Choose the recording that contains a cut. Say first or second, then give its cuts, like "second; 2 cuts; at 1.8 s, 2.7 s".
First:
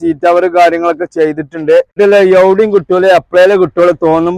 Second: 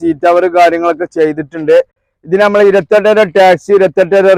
first; 1 cut; at 1.9 s